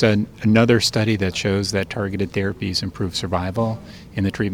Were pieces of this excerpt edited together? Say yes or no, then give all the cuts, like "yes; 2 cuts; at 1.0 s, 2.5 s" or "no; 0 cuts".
no; 0 cuts